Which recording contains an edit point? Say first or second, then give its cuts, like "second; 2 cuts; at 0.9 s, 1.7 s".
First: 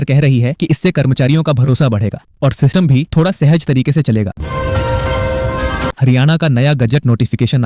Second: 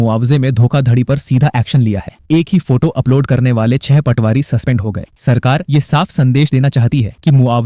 first; 2 cuts; at 4.4 s, 6.0 s